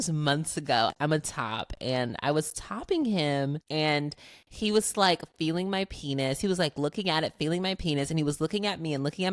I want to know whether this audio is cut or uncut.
cut